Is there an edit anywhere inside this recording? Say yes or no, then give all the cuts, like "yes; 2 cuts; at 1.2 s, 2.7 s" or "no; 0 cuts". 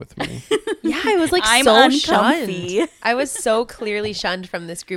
no; 0 cuts